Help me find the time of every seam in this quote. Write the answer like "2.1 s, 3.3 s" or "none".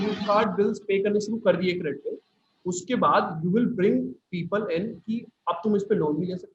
none